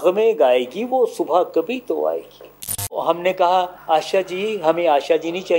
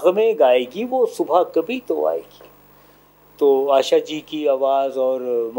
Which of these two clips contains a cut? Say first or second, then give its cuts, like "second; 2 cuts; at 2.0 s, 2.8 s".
first; 2 cuts; at 3.0 s, 3.8 s